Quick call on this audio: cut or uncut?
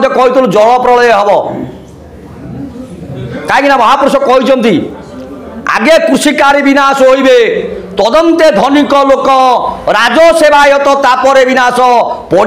uncut